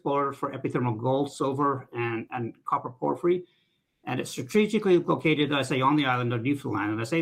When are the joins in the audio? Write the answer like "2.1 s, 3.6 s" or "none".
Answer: none